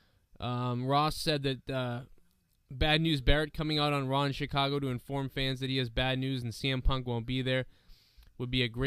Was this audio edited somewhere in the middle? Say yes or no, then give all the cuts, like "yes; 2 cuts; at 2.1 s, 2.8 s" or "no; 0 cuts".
yes; 1 cut; at 1.1 s